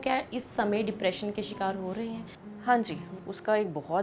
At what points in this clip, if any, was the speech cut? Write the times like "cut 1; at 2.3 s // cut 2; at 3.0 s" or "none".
cut 1; at 2.3 s // cut 2; at 3.0 s